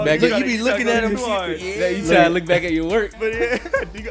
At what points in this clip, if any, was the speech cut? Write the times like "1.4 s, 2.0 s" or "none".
3.2 s